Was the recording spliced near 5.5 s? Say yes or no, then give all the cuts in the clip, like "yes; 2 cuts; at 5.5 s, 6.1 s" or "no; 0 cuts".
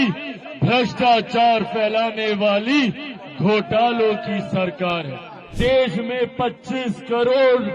yes; 1 cut; at 5.5 s